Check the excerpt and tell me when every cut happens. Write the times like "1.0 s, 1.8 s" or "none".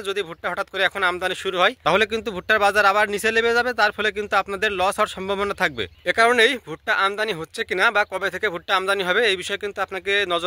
1.8 s, 5.9 s

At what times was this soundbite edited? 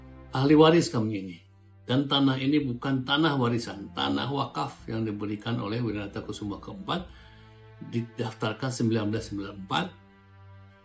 none

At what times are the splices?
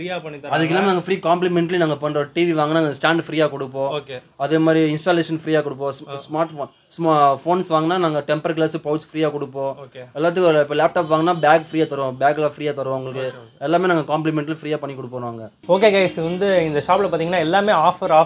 none

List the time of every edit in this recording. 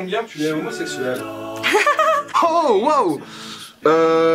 none

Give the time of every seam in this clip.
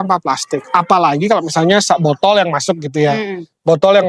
none

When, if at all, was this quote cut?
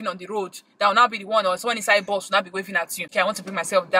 3.0 s

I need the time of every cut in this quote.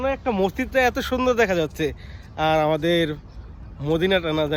none

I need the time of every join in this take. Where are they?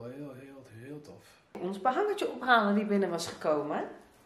1.6 s

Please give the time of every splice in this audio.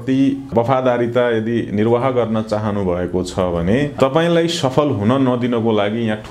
4.0 s

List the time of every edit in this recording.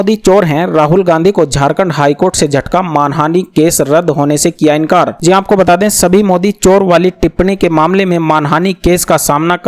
none

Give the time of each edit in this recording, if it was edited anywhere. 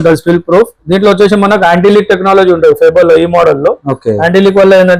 none

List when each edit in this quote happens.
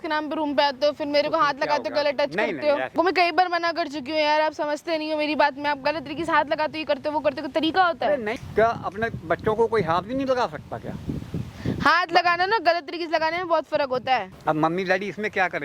2.9 s, 8.3 s, 14.3 s

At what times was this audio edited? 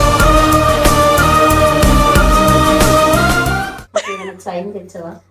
3.6 s

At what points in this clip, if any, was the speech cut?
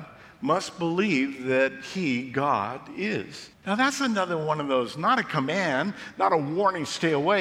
3.5 s

